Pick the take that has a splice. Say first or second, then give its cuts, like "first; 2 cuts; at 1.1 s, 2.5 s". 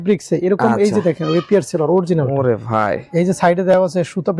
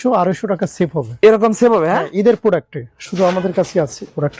second; 1 cut; at 3.0 s